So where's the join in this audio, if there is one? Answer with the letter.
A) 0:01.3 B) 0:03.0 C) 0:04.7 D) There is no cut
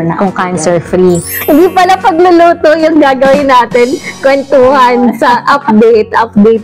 A